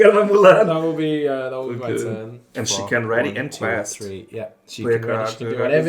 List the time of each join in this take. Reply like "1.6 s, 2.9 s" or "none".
2.4 s